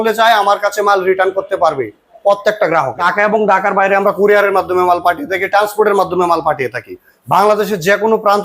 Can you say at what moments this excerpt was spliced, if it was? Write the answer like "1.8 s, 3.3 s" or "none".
3.0 s